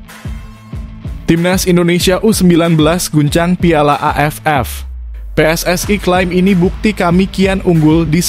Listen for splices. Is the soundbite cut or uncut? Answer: cut